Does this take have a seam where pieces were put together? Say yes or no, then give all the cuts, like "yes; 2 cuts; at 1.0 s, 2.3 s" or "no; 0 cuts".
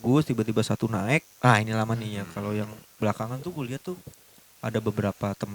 yes; 1 cut; at 1.3 s